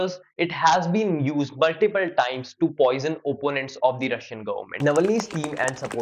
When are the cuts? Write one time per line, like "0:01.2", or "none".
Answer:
0:04.7

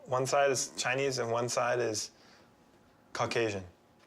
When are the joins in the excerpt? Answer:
0:01.2

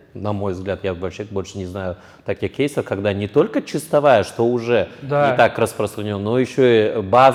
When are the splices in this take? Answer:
none

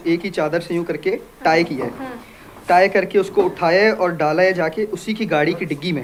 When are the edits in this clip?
none

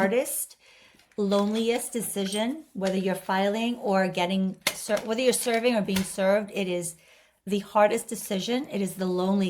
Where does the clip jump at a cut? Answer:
none

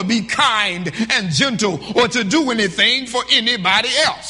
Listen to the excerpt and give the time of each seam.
none

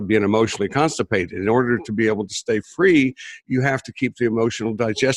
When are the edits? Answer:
none

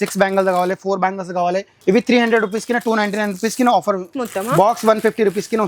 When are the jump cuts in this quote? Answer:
0:01.7
0:04.2

